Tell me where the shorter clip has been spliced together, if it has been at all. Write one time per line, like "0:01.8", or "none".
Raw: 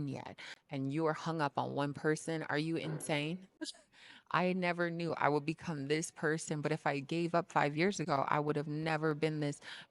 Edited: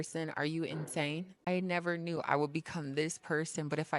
0:01.5